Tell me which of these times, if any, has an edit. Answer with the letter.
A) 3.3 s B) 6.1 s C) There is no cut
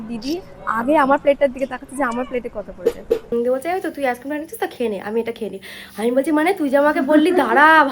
A